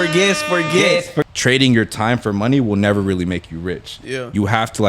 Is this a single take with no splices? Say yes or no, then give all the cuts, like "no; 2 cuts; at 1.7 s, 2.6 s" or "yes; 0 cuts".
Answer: no; 1 cut; at 1.3 s